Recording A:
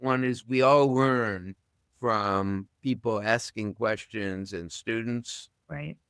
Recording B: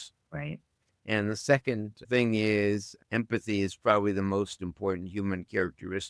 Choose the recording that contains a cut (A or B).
B